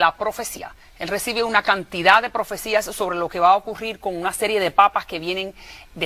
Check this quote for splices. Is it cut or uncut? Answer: cut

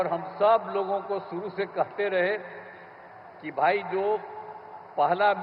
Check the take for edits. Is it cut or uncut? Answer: uncut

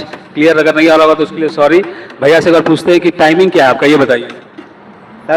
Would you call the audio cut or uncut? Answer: uncut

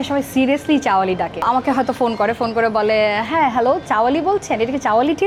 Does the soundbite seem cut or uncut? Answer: uncut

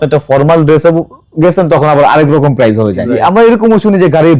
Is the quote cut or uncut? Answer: cut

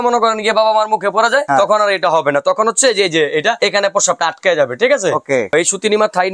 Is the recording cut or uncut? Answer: cut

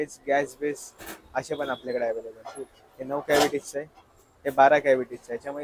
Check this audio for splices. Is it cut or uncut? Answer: uncut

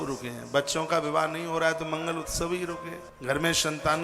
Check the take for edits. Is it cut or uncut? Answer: cut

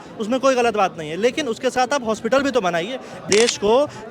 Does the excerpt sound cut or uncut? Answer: cut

